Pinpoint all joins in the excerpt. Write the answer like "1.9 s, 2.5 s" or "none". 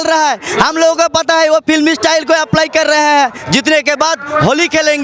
3.4 s